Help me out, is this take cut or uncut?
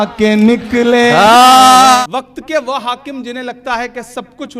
cut